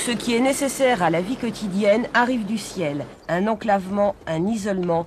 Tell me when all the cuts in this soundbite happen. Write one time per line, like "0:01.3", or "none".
0:03.1

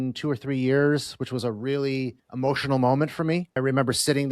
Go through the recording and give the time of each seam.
0:02.2
0:03.5

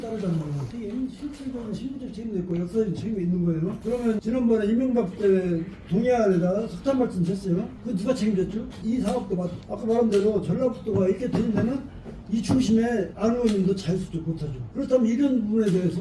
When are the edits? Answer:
0:04.2
0:08.8
0:14.6

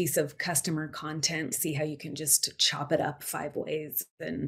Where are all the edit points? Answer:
none

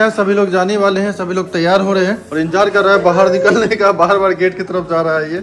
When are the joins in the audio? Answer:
none

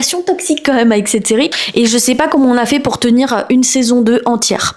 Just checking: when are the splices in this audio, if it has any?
0:01.6

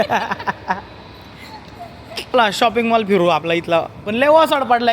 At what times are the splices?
0:02.2

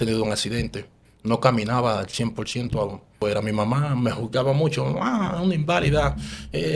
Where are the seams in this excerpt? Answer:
0:03.2

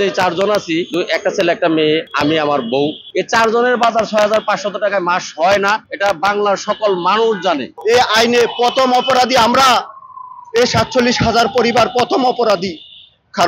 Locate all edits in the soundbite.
0:00.9
0:02.1
0:03.0
0:05.9
0:07.7

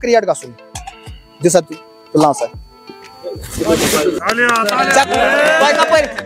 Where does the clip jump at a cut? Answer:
0:04.2

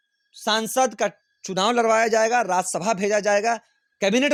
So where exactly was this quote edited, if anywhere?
none

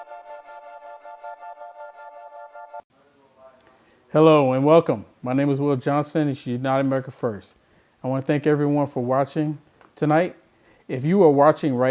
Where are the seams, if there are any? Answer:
0:01.2
0:02.8

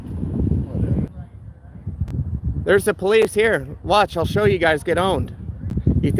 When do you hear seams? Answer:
0:01.1

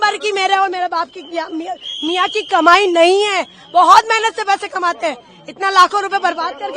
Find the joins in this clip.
none

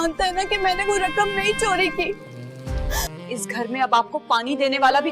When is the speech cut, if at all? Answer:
0:03.2

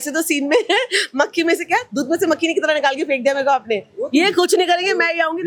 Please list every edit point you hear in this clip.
none

